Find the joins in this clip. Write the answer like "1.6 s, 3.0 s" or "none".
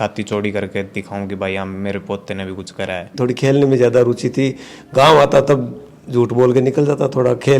3.1 s